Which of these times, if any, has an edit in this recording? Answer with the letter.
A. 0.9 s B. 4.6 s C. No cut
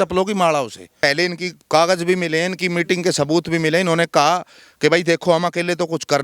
A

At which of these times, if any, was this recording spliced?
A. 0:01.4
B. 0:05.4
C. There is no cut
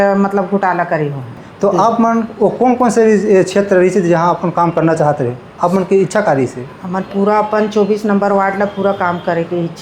A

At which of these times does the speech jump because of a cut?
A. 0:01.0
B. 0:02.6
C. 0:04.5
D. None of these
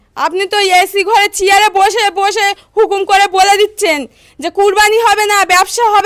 D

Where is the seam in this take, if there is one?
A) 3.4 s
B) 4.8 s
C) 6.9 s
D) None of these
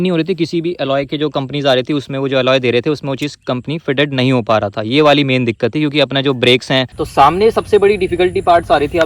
C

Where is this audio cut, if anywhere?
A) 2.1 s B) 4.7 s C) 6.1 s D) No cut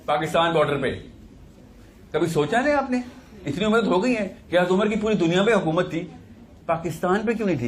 D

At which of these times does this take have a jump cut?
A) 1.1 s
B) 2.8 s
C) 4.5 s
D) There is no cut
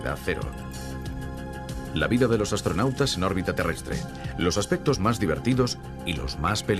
A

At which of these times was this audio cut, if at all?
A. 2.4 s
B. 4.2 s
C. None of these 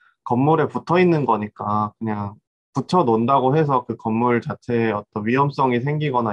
A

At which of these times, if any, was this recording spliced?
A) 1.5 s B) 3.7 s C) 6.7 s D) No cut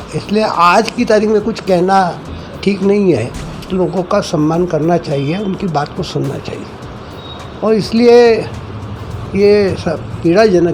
B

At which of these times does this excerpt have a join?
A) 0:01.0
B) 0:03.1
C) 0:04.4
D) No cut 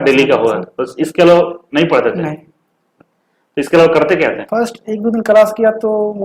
C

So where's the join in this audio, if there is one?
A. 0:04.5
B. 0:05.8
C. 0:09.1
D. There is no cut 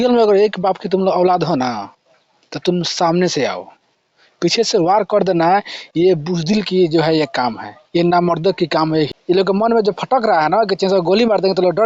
C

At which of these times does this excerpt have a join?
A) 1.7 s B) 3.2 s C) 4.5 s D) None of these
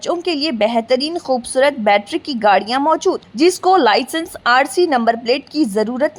D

